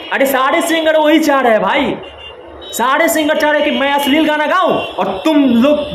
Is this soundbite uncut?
yes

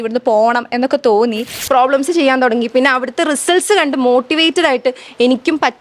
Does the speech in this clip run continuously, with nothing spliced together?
no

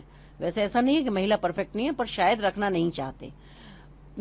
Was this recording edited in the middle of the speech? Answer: no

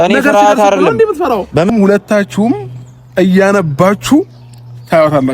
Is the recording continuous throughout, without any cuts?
no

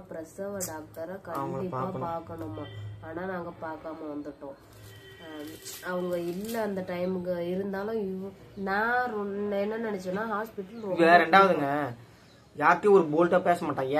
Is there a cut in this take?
no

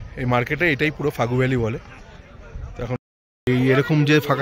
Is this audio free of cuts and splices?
no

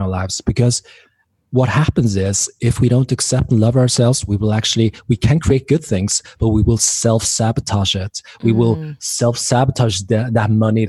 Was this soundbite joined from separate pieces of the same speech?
no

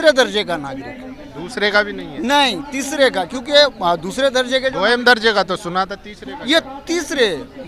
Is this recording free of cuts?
yes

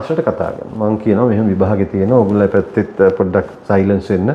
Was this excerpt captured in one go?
yes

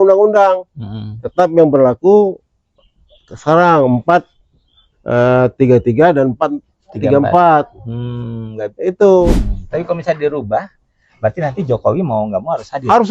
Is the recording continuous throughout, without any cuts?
no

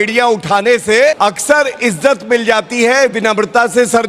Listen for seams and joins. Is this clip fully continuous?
no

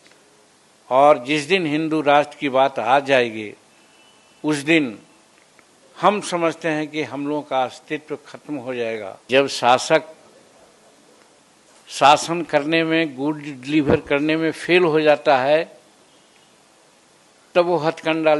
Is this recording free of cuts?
no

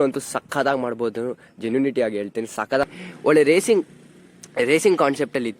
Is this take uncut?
no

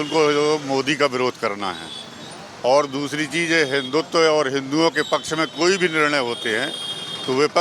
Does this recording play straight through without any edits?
yes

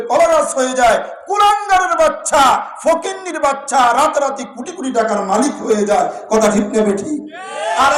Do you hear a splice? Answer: no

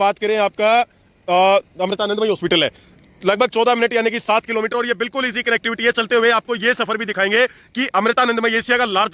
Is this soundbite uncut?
yes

